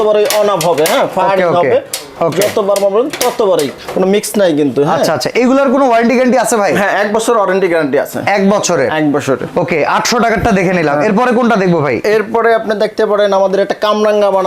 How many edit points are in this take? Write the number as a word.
zero